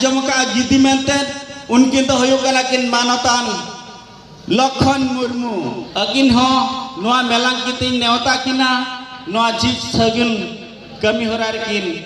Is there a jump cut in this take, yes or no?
yes